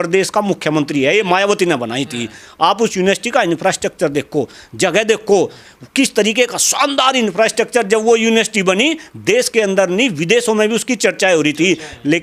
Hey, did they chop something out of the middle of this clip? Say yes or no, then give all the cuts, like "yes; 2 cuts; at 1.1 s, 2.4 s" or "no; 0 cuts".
no; 0 cuts